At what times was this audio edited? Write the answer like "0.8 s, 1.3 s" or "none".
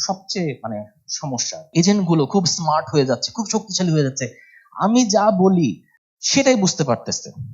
1.7 s